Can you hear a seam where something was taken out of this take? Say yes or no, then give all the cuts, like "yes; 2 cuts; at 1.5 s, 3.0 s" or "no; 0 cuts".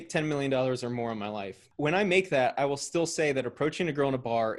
yes; 1 cut; at 1.7 s